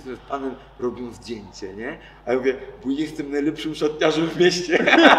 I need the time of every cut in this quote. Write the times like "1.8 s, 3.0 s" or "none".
none